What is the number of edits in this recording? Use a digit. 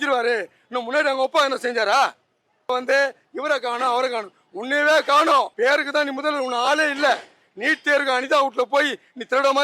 2